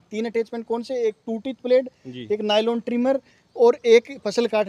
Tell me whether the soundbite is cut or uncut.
uncut